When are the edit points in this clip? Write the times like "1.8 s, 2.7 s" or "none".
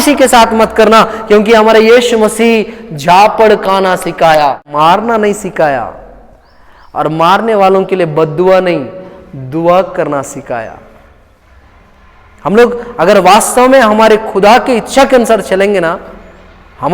4.7 s